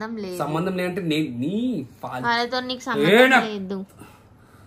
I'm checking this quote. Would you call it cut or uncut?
uncut